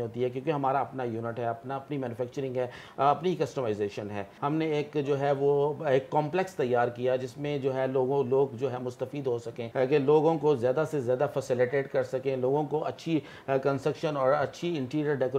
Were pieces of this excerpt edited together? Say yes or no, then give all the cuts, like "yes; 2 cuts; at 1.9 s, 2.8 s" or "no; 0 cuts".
yes; 2 cuts; at 4.3 s, 9.6 s